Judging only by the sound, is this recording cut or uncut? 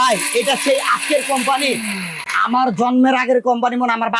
uncut